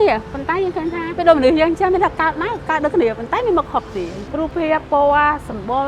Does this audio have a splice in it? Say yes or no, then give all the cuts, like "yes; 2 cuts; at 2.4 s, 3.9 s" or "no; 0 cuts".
no; 0 cuts